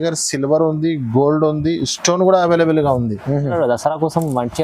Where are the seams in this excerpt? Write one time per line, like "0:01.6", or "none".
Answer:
0:03.5